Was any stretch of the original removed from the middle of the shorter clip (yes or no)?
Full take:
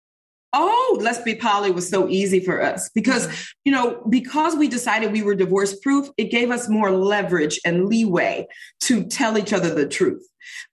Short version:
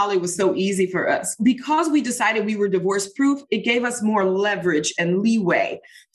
yes